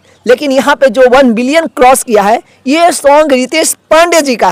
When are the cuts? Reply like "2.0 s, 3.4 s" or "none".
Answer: none